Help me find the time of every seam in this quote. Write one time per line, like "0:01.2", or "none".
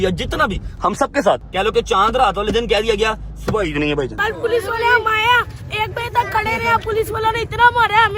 0:01.5
0:04.2